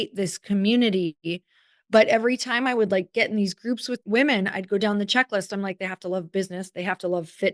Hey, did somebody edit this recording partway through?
yes; 1 cut; at 4.0 s

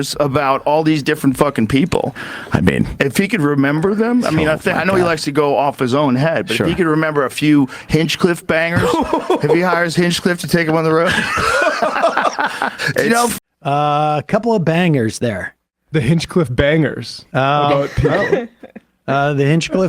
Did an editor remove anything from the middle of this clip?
yes; 1 cut; at 13.3 s

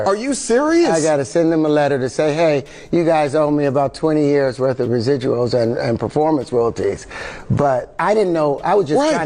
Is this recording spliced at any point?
yes; 1 cut; at 1.3 s

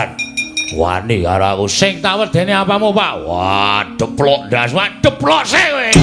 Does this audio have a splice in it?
no; 0 cuts

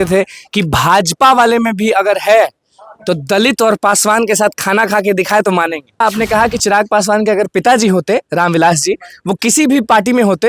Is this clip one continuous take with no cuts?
no; 1 cut; at 6.0 s

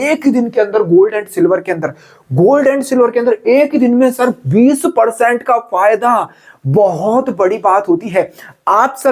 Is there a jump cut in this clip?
no; 0 cuts

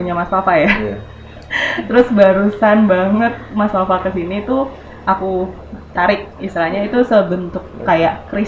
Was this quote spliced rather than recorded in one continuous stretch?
no; 0 cuts

